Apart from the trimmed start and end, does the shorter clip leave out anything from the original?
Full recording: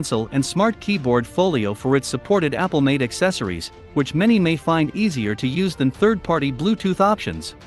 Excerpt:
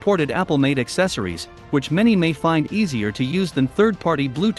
no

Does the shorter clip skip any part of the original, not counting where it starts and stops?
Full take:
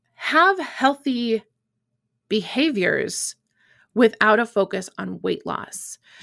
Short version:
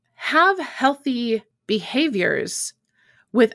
yes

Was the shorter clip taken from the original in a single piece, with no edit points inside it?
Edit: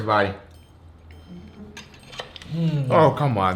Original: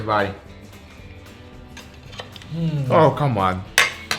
yes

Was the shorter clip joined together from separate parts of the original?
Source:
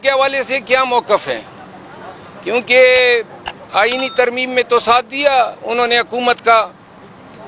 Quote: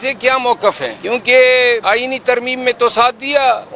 yes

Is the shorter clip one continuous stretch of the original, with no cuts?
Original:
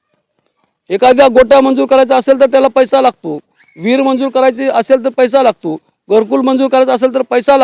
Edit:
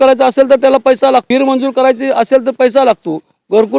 no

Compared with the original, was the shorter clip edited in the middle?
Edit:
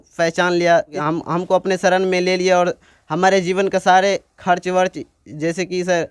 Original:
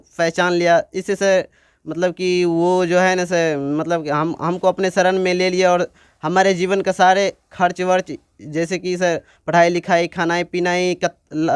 yes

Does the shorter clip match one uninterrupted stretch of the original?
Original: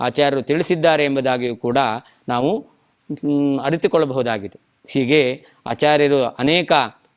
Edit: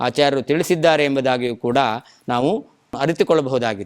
no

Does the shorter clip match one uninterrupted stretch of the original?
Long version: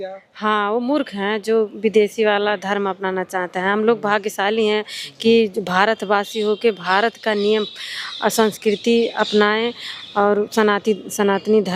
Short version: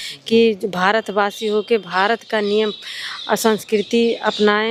yes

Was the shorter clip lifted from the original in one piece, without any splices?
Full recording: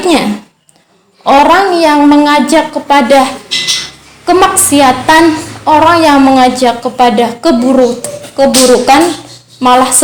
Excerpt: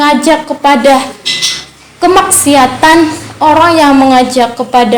yes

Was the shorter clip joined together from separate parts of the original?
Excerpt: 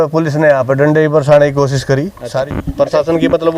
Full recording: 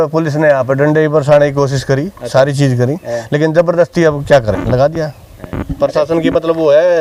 yes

